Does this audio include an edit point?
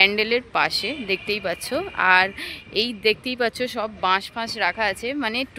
no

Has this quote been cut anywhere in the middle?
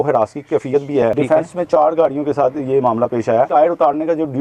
yes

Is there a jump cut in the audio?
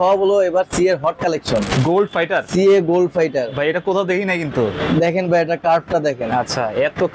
yes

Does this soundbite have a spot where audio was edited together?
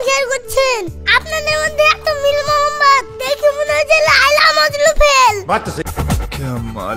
yes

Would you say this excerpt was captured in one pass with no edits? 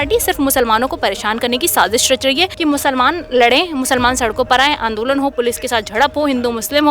no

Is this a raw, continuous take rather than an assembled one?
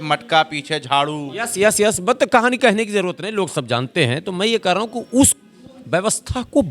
yes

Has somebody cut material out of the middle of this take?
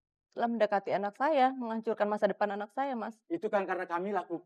no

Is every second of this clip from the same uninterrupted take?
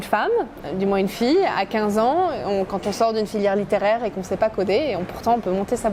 yes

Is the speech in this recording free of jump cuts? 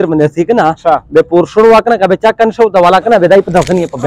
yes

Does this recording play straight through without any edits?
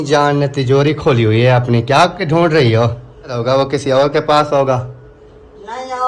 no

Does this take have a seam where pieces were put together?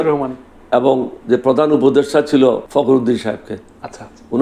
yes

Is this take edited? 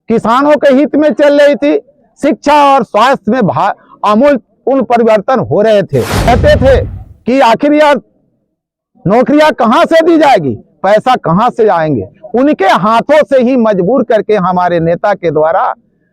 yes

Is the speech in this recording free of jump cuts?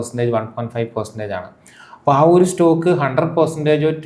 yes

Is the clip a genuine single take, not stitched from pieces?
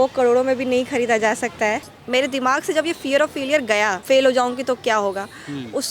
no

